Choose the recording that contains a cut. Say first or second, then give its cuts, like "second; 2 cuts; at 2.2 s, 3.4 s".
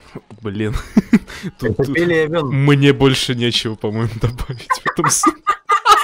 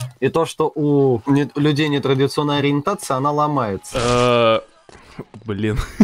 second; 2 cuts; at 1.2 s, 3.8 s